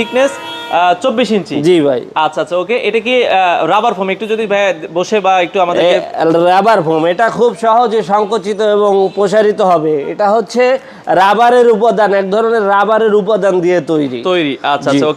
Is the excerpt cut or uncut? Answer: uncut